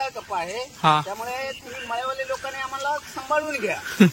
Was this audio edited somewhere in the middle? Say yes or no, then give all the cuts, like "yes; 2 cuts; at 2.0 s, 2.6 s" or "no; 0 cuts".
no; 0 cuts